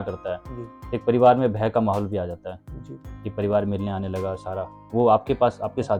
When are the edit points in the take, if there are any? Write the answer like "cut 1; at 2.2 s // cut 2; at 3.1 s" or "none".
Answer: none